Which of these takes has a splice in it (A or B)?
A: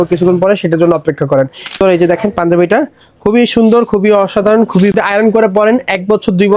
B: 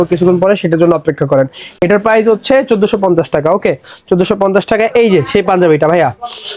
A